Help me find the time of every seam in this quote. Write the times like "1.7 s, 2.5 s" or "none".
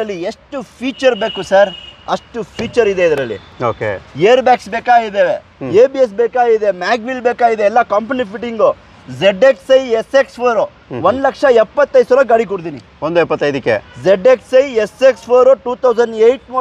none